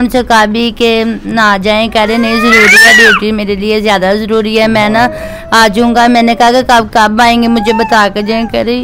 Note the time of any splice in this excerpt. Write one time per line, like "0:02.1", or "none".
none